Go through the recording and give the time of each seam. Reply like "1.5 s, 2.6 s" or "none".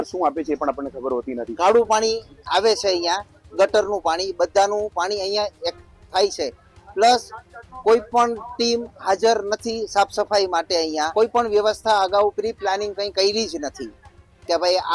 1.5 s, 11.1 s